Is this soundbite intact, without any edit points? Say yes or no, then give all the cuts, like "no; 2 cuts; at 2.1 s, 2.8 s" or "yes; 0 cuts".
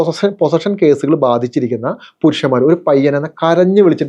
yes; 0 cuts